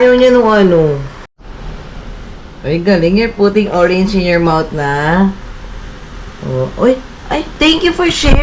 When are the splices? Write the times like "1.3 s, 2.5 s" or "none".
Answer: 1.3 s, 2.6 s, 7.5 s